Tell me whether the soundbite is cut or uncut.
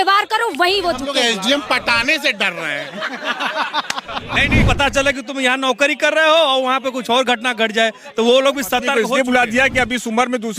cut